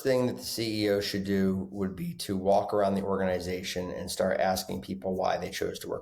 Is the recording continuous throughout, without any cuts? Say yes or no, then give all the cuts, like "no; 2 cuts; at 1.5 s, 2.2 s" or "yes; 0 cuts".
yes; 0 cuts